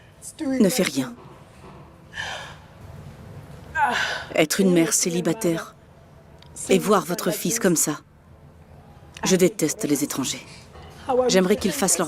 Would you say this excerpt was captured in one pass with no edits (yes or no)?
no